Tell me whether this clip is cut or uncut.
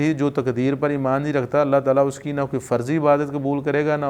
uncut